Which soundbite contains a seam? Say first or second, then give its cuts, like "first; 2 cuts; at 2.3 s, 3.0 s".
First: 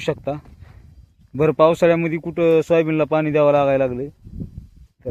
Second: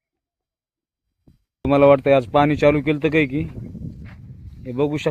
second; 1 cut; at 1.7 s